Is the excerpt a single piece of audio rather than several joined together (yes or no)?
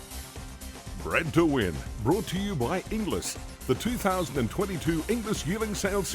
no